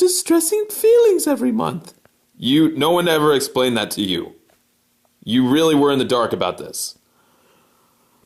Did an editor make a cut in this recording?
yes; 1 cut; at 3.5 s

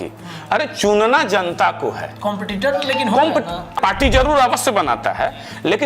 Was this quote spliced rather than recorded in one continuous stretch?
yes; 1 cut; at 3.7 s

